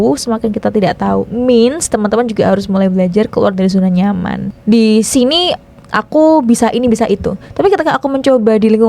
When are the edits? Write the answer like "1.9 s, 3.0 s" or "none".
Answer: 4.5 s, 5.5 s